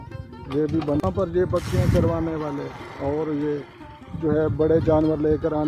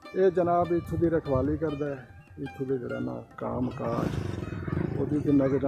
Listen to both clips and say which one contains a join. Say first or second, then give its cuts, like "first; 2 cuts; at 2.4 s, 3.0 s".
first; 1 cut; at 1.0 s